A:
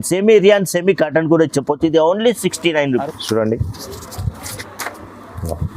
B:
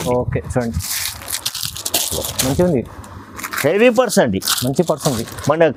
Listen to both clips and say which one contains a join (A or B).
A